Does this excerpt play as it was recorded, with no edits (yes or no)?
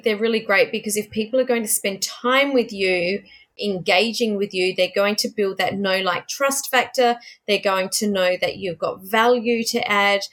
no